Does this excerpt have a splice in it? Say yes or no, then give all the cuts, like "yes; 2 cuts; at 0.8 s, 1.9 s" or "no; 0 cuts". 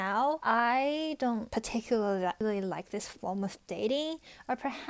no; 0 cuts